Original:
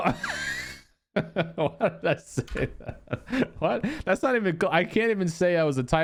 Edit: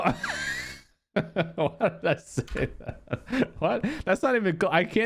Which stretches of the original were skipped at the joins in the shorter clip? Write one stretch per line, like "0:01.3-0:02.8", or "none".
none